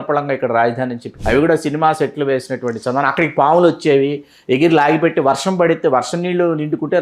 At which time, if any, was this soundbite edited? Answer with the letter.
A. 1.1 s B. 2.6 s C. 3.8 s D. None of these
A